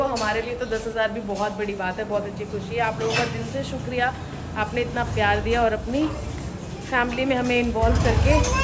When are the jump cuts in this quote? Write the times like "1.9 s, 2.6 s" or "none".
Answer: none